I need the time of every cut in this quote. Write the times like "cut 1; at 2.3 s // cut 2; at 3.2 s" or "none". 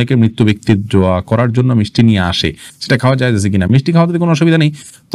none